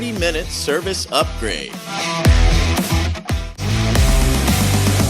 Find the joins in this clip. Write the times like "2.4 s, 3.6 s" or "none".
3.5 s